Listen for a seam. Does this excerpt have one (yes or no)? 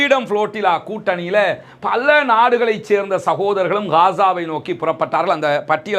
no